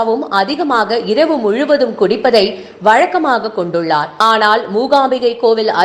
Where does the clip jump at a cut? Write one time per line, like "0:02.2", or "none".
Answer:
none